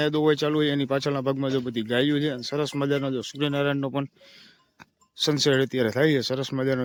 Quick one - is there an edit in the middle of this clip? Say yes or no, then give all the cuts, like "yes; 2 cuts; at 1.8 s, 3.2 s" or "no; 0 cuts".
no; 0 cuts